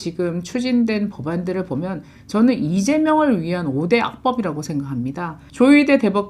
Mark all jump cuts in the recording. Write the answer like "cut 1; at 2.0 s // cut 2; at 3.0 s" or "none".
cut 1; at 5.4 s